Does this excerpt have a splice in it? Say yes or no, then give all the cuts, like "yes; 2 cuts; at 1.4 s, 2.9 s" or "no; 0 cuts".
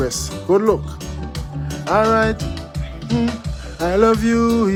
no; 0 cuts